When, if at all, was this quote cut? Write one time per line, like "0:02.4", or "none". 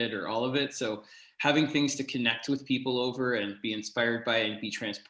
none